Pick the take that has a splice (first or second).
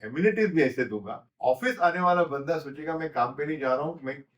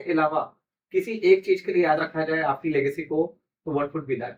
first